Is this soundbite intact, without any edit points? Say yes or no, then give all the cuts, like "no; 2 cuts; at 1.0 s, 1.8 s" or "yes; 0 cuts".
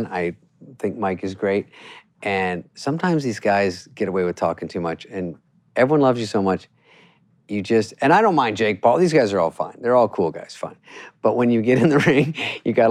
yes; 0 cuts